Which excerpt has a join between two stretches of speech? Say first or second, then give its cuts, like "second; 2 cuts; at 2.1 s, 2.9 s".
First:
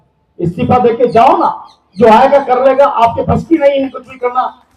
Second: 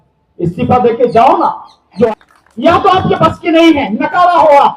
second; 1 cut; at 2.1 s